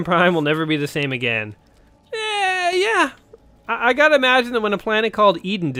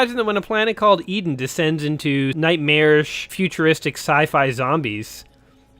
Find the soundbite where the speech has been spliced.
second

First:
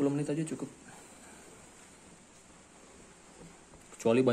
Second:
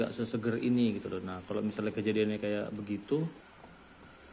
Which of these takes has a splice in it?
second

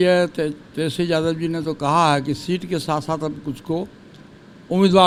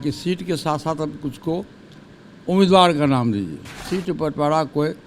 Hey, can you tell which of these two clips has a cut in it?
second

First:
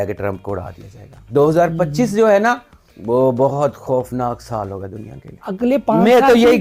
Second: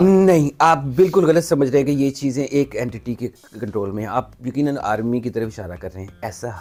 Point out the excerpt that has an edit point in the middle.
first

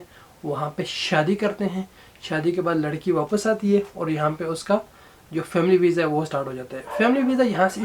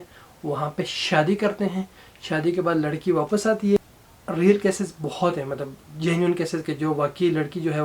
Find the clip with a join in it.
second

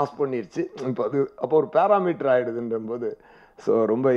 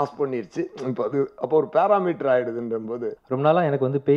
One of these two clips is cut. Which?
second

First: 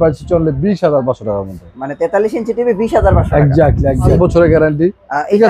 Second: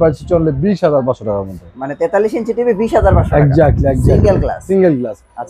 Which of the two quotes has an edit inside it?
first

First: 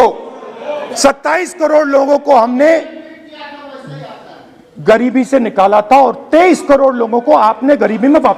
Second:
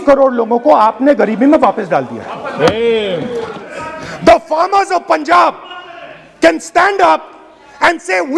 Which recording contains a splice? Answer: second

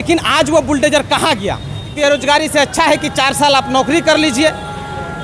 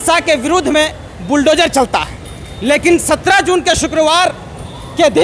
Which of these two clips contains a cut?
first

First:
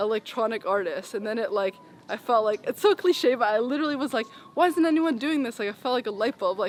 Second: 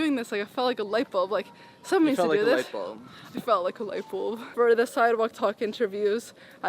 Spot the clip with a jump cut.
second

